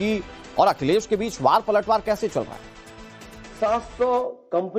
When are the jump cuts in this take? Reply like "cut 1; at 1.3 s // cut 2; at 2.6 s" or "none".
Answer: cut 1; at 3.9 s